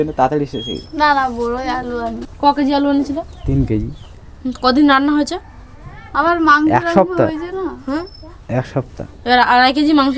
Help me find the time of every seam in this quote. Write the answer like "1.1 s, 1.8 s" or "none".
2.2 s